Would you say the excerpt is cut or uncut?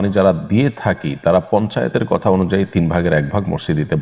uncut